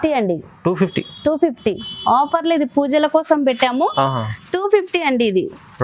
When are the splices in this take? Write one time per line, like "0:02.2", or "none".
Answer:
none